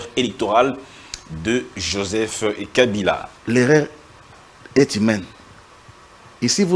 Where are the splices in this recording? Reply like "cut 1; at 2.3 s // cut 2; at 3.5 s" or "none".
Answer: cut 1; at 3.3 s

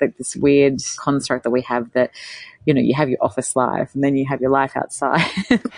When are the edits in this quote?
cut 1; at 0.9 s

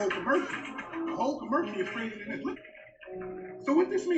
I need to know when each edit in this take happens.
cut 1; at 2.6 s

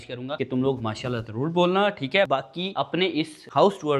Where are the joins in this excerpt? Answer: none

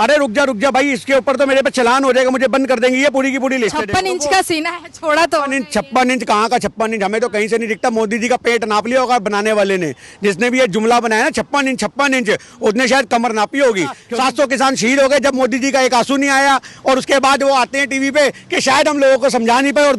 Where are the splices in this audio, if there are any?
cut 1; at 3.8 s // cut 2; at 14.0 s

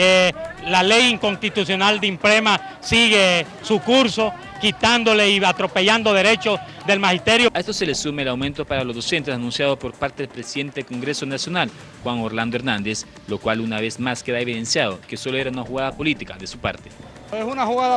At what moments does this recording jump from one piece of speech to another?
none

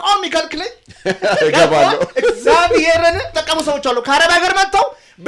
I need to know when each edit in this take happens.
cut 1; at 3.3 s

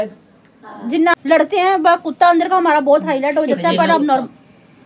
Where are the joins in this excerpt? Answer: cut 1; at 1.1 s

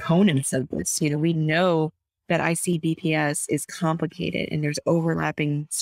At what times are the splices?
none

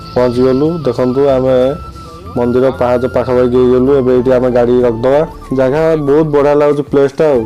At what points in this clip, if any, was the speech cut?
cut 1; at 5.4 s

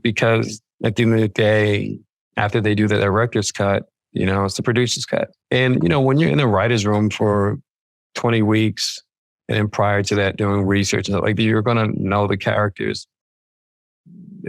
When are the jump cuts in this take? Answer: cut 1; at 5.4 s

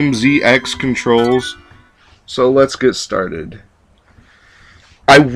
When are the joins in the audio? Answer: none

